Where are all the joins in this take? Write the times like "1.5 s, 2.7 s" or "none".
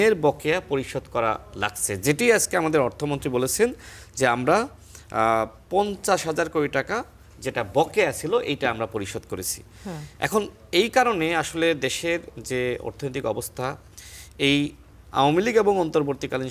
none